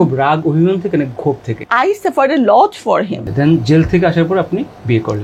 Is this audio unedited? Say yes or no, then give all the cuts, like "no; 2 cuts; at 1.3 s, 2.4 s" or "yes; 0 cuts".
no; 2 cuts; at 1.5 s, 3.2 s